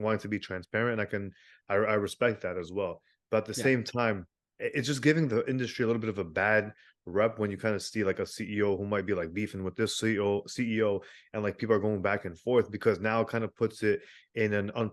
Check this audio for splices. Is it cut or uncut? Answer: uncut